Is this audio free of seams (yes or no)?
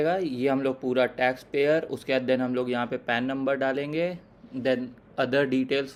yes